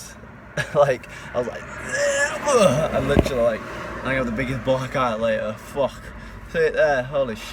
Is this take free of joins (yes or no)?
yes